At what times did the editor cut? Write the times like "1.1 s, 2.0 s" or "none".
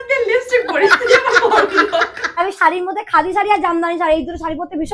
2.4 s